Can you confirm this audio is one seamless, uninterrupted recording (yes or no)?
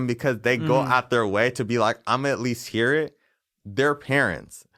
yes